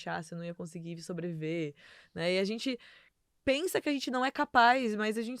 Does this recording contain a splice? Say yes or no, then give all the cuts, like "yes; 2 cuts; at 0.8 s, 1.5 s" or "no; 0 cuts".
no; 0 cuts